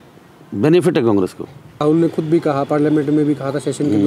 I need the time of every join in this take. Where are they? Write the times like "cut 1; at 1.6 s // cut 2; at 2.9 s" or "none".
cut 1; at 1.7 s